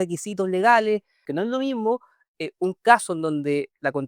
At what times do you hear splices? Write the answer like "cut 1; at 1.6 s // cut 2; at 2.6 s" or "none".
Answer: cut 1; at 1.2 s